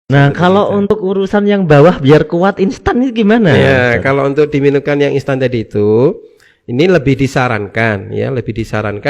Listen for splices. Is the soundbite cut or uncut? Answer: cut